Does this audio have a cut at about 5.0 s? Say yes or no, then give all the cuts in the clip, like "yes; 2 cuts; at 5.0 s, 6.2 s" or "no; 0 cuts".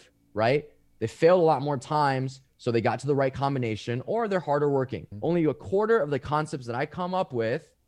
yes; 1 cut; at 5.0 s